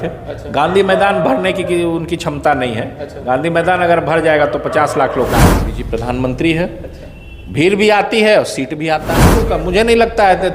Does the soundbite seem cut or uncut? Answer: cut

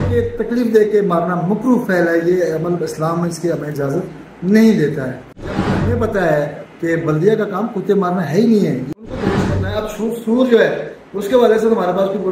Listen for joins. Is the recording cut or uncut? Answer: cut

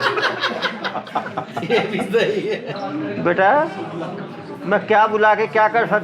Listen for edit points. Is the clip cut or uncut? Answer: cut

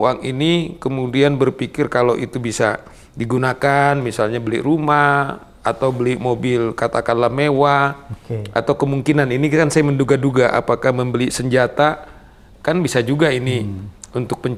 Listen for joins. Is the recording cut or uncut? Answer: uncut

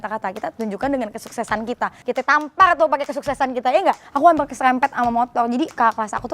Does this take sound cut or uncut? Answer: cut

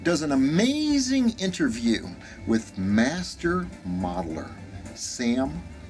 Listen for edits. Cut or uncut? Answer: uncut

